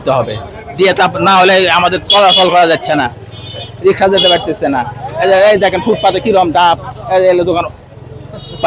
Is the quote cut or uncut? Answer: uncut